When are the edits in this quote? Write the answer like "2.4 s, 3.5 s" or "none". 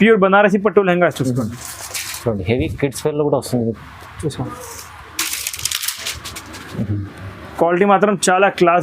none